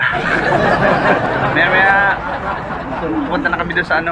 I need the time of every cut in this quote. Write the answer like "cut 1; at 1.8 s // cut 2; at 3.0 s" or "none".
cut 1; at 1.2 s